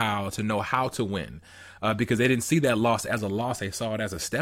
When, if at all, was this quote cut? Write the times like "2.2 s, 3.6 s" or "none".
none